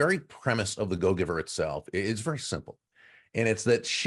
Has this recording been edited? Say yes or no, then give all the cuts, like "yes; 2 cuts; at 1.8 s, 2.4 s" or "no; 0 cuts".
no; 0 cuts